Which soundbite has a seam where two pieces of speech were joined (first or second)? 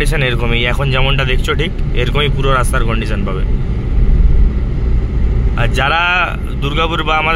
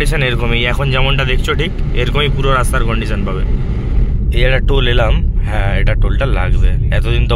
second